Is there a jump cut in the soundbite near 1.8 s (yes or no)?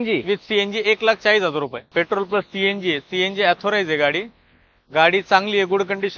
yes